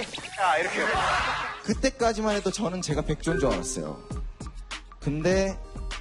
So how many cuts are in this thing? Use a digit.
1